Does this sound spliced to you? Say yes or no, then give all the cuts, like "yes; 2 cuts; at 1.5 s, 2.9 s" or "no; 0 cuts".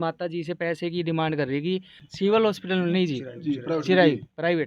no; 0 cuts